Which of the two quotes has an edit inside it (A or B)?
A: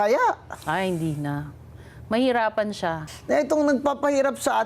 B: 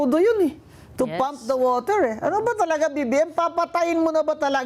A